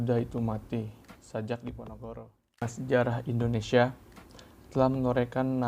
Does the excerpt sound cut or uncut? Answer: cut